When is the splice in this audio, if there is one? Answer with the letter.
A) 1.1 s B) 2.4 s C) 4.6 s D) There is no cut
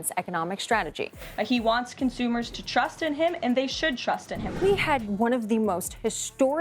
C